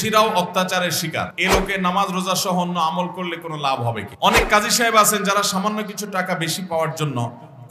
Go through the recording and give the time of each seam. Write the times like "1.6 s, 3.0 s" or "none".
1.3 s, 4.1 s